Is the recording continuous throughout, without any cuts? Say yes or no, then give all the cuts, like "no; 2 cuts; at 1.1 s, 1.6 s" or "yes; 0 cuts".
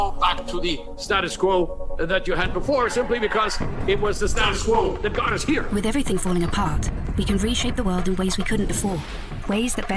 yes; 0 cuts